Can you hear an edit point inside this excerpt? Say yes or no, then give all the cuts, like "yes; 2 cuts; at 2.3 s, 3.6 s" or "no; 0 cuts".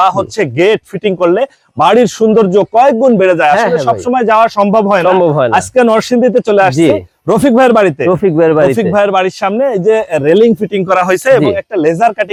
no; 0 cuts